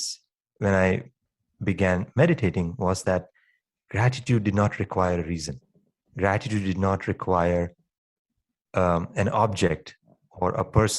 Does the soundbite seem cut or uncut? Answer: cut